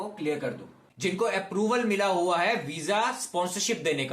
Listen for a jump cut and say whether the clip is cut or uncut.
cut